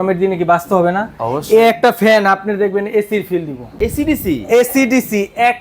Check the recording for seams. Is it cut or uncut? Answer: cut